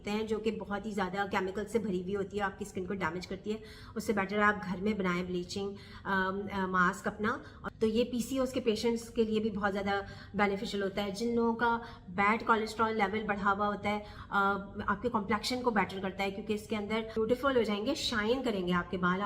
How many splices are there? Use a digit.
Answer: 3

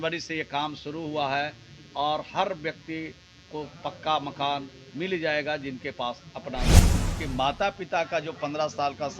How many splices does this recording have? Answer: 1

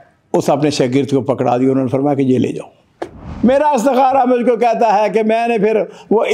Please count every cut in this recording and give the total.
1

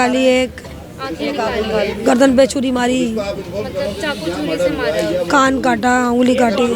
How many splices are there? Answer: 0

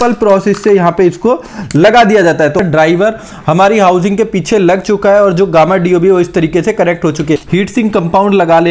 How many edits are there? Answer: 2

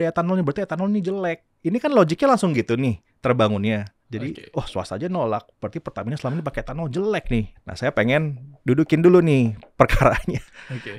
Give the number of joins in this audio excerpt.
3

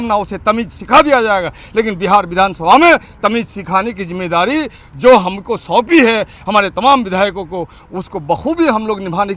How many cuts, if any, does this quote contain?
0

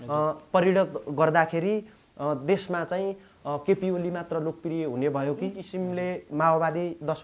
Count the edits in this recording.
1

